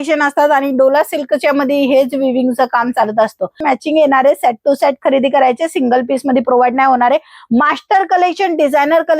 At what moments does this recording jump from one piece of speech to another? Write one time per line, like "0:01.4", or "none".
0:03.6